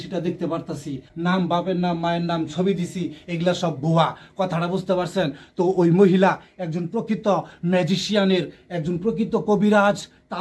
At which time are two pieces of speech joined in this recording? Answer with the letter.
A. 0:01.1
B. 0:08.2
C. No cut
A